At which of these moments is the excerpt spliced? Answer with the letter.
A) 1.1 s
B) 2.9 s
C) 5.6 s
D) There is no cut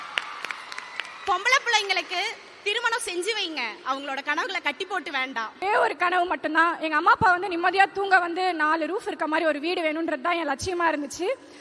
C